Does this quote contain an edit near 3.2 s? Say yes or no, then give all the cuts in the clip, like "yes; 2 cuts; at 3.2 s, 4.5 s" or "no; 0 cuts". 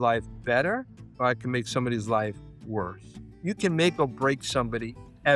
yes; 2 cuts; at 1.0 s, 3.2 s